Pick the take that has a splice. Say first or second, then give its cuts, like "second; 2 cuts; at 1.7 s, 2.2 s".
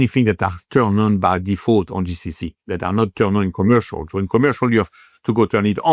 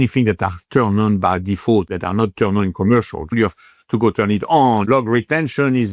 second; 3 cuts; at 1.9 s, 3.3 s, 4.9 s